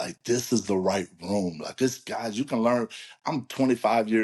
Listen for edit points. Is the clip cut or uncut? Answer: uncut